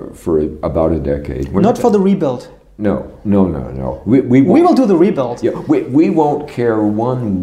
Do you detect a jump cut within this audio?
no; 0 cuts

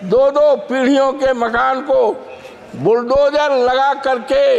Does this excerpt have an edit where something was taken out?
no; 0 cuts

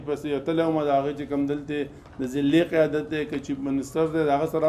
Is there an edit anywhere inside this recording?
no; 0 cuts

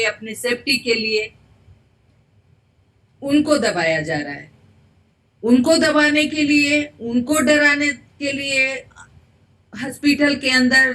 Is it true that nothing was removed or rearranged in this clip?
yes; 0 cuts

